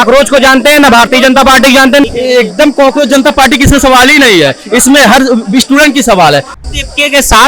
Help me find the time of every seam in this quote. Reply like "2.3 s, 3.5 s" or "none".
2.1 s, 6.6 s